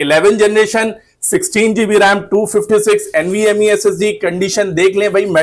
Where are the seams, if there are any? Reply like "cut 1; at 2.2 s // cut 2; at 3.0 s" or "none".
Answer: none